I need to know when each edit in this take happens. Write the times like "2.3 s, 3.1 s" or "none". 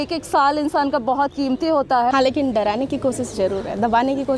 2.1 s